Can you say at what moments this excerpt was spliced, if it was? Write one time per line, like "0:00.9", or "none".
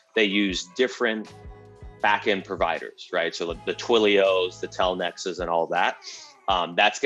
none